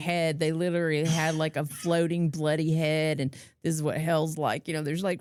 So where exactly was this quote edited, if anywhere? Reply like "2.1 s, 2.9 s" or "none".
none